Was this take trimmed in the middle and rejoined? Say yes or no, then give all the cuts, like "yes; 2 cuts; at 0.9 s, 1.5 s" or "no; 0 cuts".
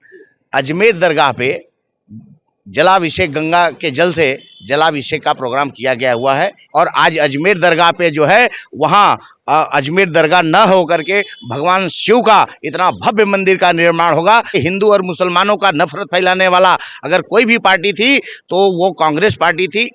yes; 2 cuts; at 6.6 s, 14.6 s